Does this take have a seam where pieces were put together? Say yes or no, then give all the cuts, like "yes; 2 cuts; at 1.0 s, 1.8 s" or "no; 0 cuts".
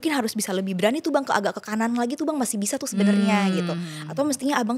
no; 0 cuts